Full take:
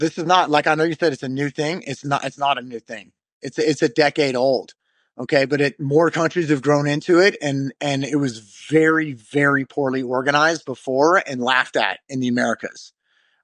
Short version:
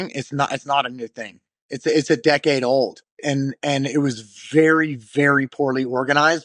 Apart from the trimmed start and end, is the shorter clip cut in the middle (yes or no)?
yes